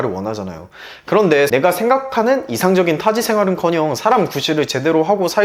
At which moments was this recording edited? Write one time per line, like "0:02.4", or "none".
0:01.5